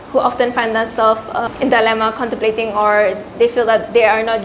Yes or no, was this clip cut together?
yes